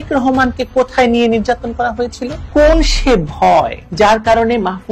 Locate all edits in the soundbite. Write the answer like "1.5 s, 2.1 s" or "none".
2.3 s